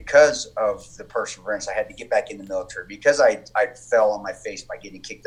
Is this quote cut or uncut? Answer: uncut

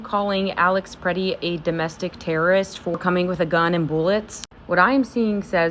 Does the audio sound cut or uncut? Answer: uncut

